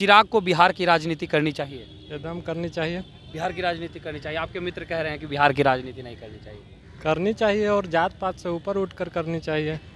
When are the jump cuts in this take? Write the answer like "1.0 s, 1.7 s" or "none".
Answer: none

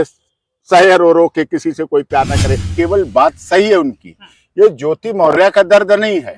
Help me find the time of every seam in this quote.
2.7 s

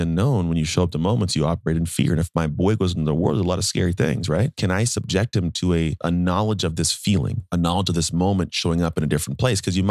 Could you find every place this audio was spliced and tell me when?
4.5 s, 6.0 s

